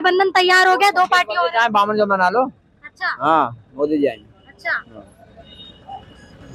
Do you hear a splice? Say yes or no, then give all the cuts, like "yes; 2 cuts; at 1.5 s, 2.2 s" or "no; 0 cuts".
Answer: no; 0 cuts